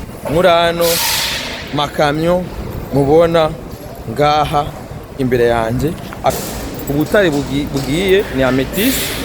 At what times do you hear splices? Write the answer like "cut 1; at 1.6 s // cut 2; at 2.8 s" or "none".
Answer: cut 1; at 6.3 s